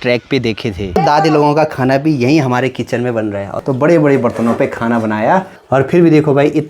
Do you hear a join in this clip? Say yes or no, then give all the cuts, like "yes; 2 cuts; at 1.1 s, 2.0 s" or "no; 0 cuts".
yes; 3 cuts; at 1.0 s, 3.6 s, 5.6 s